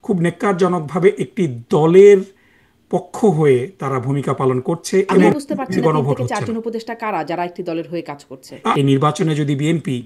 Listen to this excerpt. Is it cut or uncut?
cut